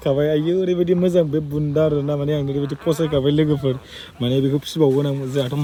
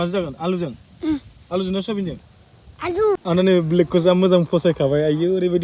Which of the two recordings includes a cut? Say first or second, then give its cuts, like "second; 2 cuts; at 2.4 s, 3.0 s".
second; 1 cut; at 3.2 s